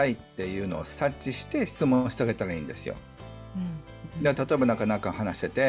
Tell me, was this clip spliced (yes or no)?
no